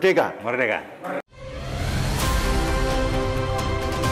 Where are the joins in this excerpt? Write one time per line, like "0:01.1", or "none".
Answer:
0:01.2